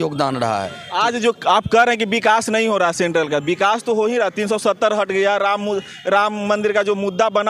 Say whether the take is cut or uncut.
uncut